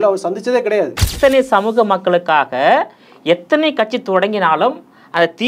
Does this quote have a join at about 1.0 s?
yes; 1 cut; at 1.0 s

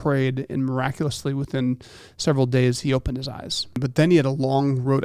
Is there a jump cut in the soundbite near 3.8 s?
yes; 1 cut; at 3.8 s

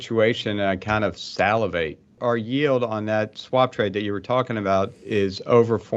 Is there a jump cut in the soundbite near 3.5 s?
no; 1 cut; at 2.2 s

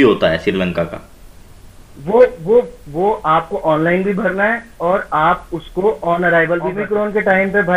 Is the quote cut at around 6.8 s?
yes; 1 cut; at 6.8 s

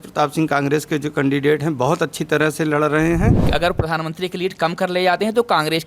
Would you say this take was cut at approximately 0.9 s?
no; 1 cut; at 3.4 s

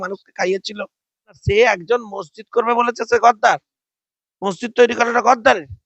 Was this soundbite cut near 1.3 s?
yes; 1 cut; at 1.3 s

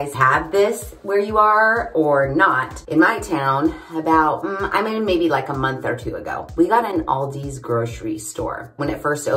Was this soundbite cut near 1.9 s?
no; 0 cuts

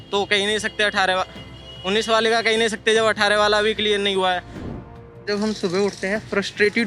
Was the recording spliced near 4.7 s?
yes; 1 cut; at 4.7 s

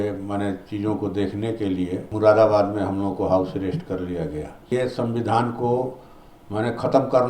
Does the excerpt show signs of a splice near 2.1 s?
yes; 2 cuts; at 2.1 s, 4.6 s

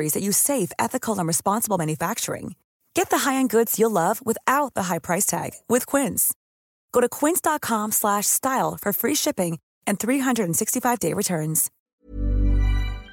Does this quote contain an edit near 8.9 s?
no; 1 cut; at 11.8 s

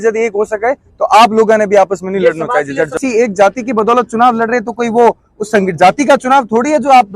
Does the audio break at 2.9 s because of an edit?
yes; 1 cut; at 2.9 s

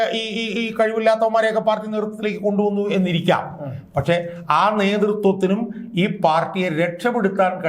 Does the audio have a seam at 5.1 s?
no; 0 cuts

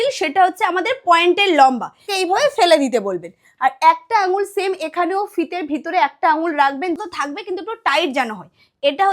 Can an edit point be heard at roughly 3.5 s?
no; 2 cuts; at 2.0 s, 7.0 s

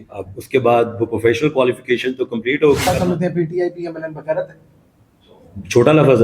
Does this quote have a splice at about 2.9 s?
yes; 1 cut; at 2.9 s

